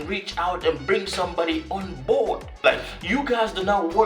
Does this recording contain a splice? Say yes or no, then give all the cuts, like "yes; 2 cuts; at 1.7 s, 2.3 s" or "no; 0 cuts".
yes; 1 cut; at 2.5 s